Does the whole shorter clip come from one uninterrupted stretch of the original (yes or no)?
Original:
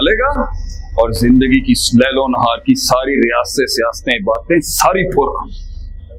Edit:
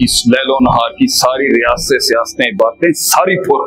yes